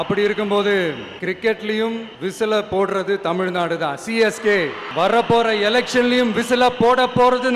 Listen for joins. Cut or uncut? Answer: cut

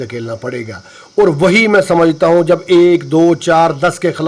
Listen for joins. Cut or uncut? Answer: uncut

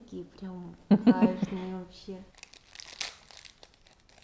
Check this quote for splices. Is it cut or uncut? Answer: cut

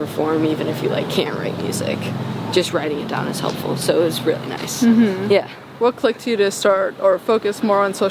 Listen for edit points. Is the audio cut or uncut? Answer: uncut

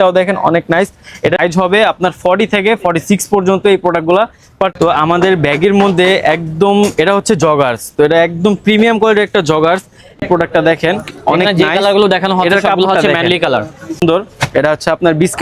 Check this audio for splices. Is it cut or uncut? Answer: cut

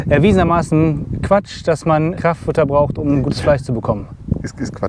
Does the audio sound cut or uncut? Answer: uncut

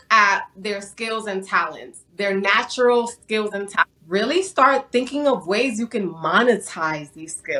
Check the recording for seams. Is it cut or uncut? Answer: cut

